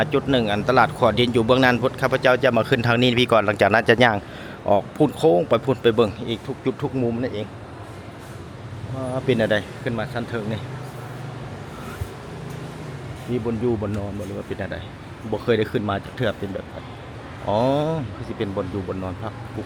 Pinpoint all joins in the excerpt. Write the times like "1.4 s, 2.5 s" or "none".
none